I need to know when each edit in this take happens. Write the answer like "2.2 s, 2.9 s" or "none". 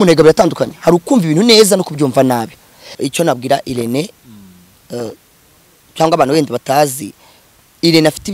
3.0 s